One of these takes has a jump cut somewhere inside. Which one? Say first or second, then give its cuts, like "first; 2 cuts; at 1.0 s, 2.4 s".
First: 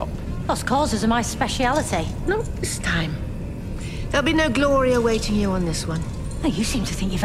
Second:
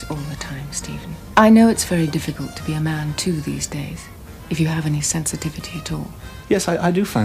second; 2 cuts; at 1.2 s, 6.3 s